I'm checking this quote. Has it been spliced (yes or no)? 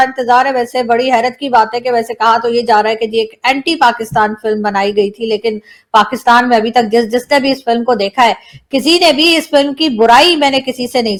no